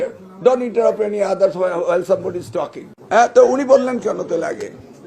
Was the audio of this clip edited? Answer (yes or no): yes